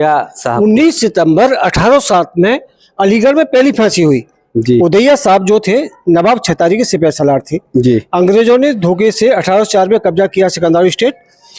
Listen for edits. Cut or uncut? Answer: uncut